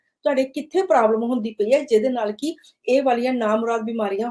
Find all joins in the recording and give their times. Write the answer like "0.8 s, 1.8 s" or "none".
none